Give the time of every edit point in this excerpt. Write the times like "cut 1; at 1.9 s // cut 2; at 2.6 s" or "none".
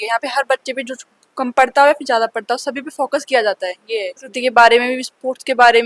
cut 1; at 4.3 s